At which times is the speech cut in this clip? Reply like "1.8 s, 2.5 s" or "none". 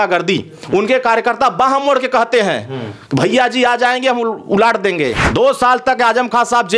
5.2 s